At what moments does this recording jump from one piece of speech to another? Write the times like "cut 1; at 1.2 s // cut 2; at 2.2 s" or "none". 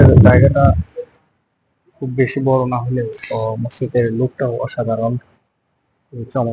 none